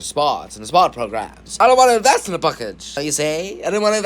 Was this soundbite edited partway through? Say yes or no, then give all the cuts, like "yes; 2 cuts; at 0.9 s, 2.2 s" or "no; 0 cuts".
yes; 2 cuts; at 1.5 s, 3.0 s